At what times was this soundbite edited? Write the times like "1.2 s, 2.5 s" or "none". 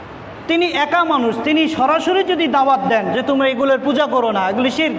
none